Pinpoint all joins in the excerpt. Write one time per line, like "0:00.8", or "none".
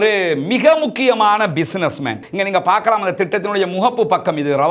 0:02.2